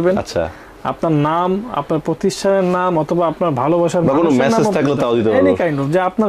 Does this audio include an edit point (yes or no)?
no